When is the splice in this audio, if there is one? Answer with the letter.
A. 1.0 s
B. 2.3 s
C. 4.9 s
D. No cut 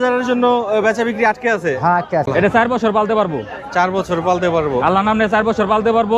B